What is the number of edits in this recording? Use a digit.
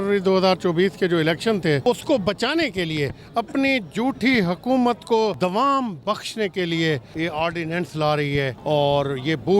4